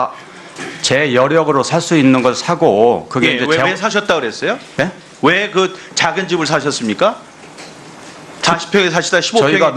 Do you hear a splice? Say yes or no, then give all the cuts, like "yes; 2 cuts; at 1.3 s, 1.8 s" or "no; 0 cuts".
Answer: no; 0 cuts